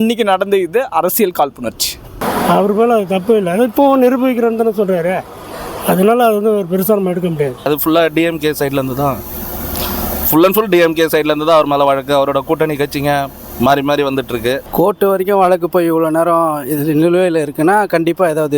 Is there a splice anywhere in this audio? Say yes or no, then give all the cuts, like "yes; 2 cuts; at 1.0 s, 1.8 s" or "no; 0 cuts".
yes; 2 cuts; at 7.7 s, 14.7 s